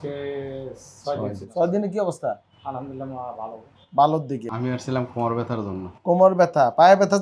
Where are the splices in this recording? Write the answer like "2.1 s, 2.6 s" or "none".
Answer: 4.4 s